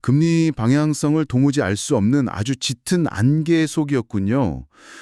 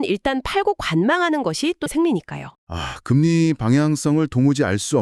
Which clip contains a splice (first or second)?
second